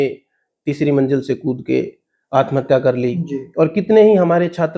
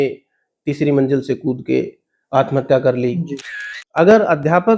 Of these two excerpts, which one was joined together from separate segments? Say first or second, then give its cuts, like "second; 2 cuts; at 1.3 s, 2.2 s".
second; 1 cut; at 3.6 s